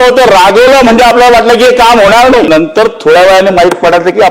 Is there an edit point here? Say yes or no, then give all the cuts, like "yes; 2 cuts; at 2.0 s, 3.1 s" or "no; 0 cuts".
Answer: yes; 1 cut; at 2.5 s